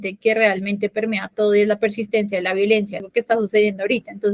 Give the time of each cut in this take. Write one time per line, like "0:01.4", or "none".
0:03.1